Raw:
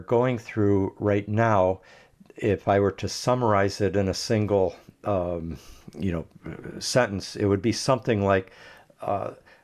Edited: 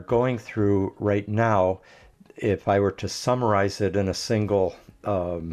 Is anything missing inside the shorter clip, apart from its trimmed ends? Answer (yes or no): no